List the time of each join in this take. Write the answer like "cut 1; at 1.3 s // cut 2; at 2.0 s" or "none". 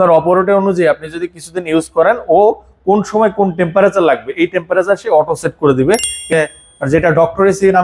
cut 1; at 6.2 s